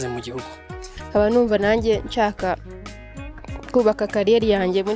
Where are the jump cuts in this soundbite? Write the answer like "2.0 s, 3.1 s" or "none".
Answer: none